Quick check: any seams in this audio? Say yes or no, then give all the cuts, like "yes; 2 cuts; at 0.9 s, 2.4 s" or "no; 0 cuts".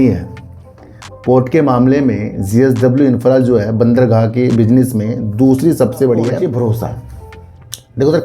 yes; 1 cut; at 6.3 s